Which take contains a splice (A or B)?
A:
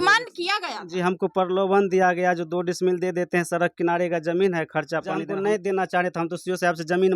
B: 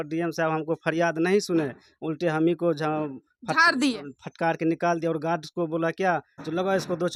A